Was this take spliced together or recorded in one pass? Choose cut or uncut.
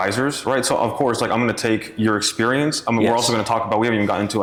uncut